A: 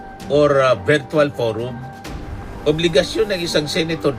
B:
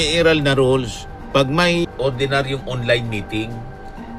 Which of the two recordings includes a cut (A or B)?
B